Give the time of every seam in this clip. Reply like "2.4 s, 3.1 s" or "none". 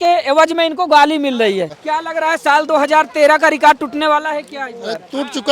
1.8 s